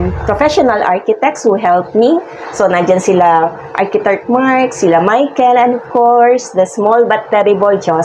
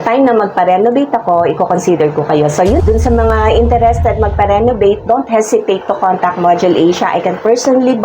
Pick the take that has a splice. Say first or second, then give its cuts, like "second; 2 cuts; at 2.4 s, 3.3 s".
second; 1 cut; at 2.8 s